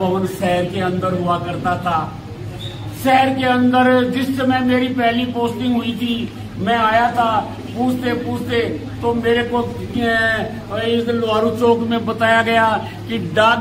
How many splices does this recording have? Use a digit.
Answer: 0